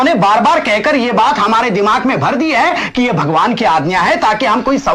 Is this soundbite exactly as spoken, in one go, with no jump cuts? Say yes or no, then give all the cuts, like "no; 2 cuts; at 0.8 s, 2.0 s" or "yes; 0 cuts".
yes; 0 cuts